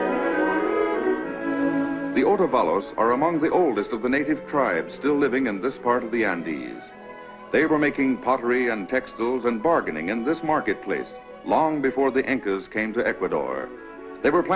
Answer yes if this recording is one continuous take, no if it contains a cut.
no